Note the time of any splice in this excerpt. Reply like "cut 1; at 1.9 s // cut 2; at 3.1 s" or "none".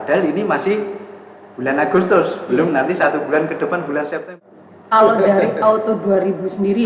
cut 1; at 4.4 s